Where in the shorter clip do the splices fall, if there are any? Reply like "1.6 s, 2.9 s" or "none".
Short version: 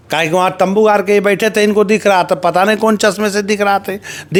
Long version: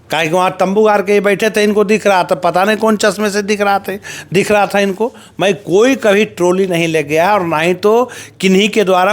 none